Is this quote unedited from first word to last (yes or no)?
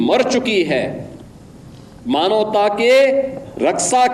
yes